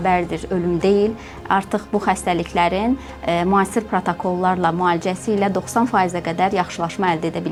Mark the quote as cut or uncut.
uncut